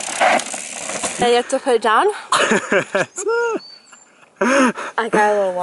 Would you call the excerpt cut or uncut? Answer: cut